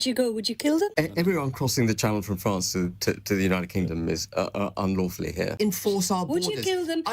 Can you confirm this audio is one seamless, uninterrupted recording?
no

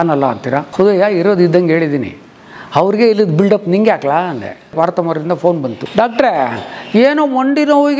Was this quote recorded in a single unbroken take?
no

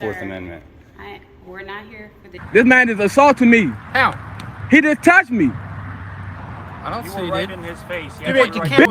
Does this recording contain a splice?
yes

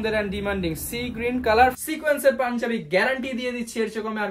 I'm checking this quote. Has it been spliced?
yes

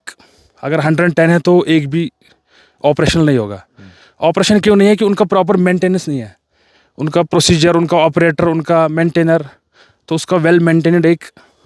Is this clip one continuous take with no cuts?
yes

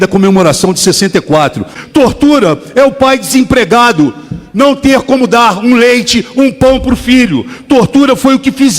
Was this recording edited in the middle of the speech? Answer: yes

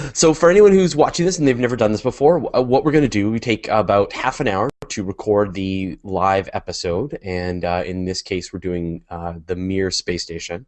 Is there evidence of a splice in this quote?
yes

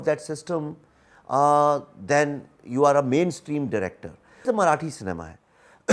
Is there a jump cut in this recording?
yes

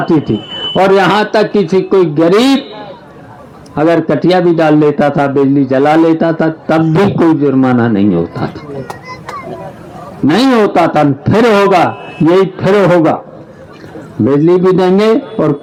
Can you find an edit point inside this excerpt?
no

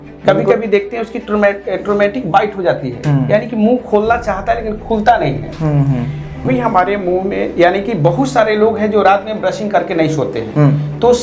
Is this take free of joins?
no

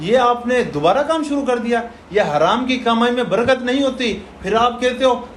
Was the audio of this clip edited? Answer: no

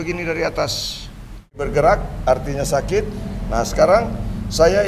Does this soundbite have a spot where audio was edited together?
yes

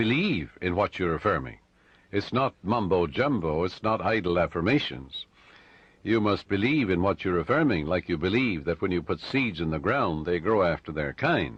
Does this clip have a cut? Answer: no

